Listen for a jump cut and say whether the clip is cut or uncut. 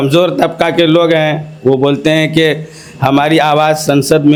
uncut